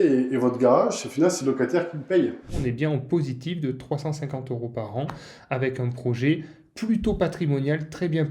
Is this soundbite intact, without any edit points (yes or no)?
no